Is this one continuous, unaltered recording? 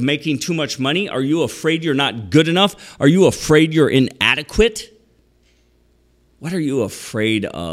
yes; 0 cuts

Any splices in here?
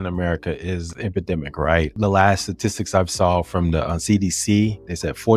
no; 0 cuts

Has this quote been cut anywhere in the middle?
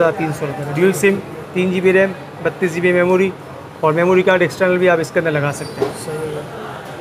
no; 0 cuts

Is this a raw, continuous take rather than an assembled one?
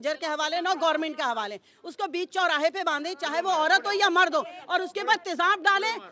yes; 0 cuts

